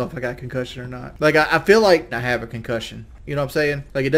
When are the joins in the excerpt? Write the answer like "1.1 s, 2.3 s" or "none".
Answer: 1.1 s